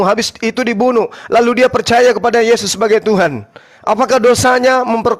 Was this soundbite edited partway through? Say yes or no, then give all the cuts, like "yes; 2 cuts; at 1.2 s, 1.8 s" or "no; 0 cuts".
no; 0 cuts